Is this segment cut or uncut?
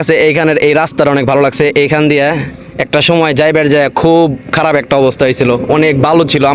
uncut